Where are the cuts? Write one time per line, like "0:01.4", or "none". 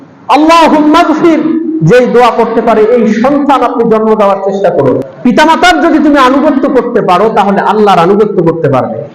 0:05.1